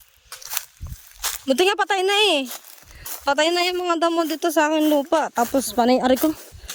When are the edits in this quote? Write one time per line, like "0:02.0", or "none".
none